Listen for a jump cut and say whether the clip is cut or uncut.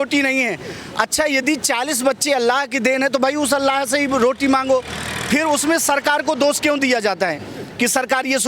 uncut